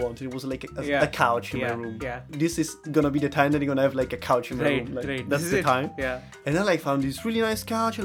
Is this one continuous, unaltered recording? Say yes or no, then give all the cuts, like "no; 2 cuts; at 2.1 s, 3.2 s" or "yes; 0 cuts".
no; 2 cuts; at 2.2 s, 6.4 s